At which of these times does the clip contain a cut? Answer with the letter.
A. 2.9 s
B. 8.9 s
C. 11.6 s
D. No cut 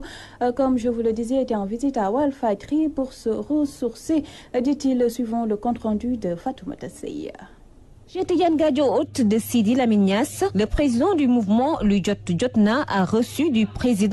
B